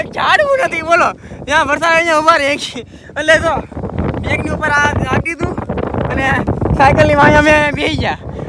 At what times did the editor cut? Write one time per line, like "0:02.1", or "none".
none